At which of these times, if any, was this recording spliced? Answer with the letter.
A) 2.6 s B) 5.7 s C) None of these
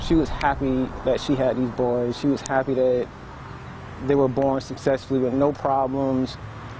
C